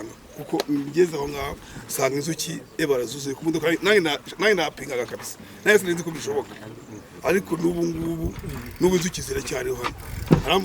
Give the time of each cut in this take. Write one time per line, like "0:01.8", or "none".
none